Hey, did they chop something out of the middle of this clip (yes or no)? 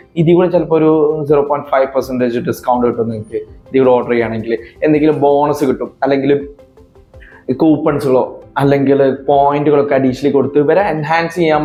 no